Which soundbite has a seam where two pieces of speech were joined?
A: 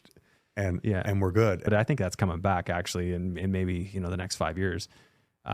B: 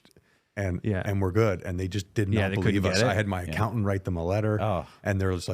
A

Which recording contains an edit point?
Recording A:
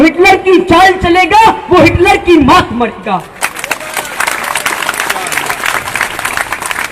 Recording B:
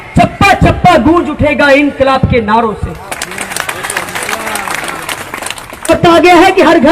B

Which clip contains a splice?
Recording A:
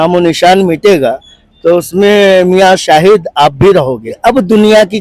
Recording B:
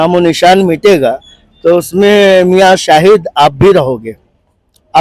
A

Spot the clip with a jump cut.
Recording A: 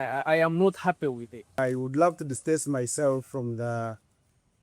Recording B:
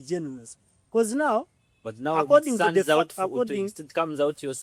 A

